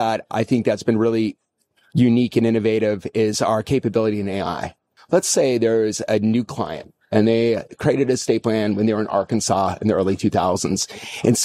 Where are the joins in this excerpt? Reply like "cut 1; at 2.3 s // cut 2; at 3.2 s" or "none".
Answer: cut 1; at 4.9 s

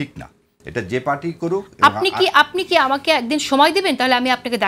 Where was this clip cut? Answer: none

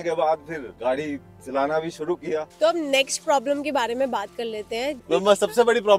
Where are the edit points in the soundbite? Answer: cut 1; at 2.5 s // cut 2; at 5.0 s

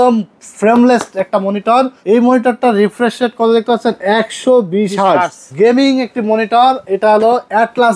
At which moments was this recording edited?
cut 1; at 2.0 s // cut 2; at 5.4 s

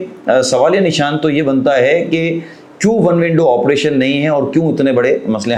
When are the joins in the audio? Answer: none

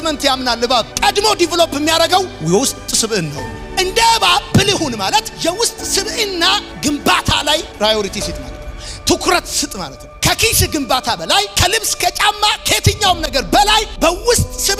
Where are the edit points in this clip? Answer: none

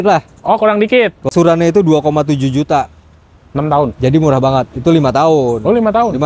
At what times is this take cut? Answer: cut 1; at 1.3 s

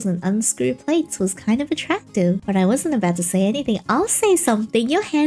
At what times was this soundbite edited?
cut 1; at 2.4 s

